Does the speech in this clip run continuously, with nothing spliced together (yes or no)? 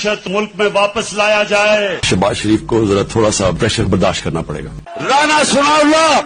yes